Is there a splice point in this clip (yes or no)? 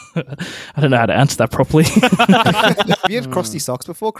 yes